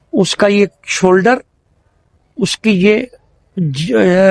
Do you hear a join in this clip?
no; 0 cuts

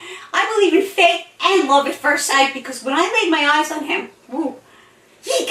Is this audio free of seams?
yes; 0 cuts

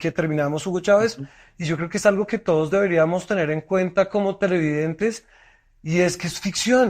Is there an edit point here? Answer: no; 0 cuts

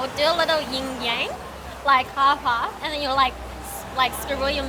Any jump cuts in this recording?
no; 0 cuts

